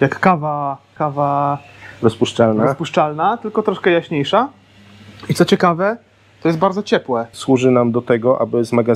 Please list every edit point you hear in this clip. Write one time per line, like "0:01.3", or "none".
0:01.0
0:07.3